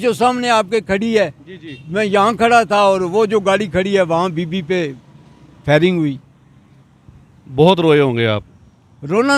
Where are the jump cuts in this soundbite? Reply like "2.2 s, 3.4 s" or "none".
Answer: none